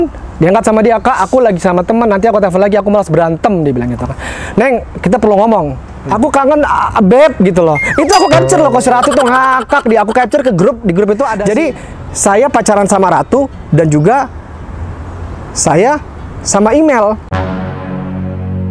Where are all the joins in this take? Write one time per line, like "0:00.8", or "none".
0:06.0
0:11.4